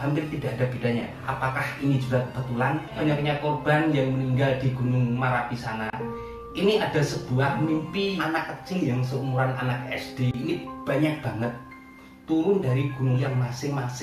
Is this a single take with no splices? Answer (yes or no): no